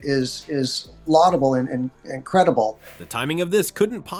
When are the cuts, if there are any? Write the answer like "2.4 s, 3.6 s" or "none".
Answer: none